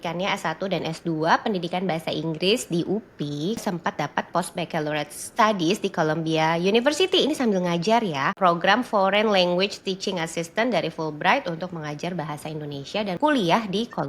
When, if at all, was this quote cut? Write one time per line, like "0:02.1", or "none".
0:03.6
0:08.3
0:13.2